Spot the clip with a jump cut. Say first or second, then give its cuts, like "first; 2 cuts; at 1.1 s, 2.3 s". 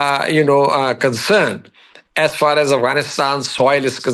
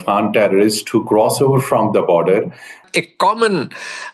second; 1 cut; at 2.8 s